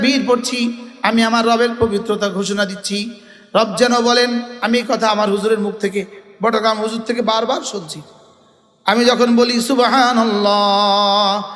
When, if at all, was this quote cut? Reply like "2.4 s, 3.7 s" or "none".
none